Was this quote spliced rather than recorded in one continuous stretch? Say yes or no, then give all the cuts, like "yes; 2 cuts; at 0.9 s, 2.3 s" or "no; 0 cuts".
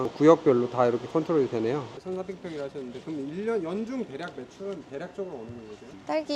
yes; 1 cut; at 2.4 s